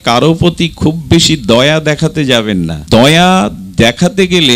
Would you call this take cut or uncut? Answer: cut